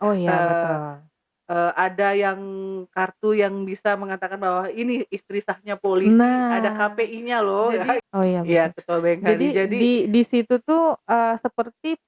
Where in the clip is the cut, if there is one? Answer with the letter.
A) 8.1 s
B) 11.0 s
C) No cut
A